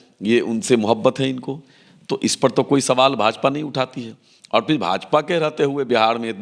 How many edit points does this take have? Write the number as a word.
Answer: zero